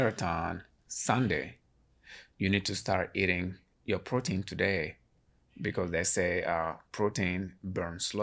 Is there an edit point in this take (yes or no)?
yes